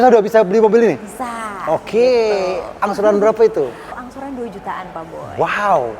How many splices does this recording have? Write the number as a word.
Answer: one